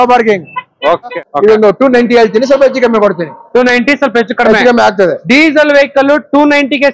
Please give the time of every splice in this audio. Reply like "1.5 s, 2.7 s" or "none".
1.2 s